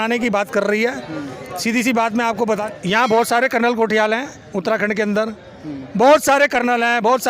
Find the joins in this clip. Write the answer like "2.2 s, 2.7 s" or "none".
2.6 s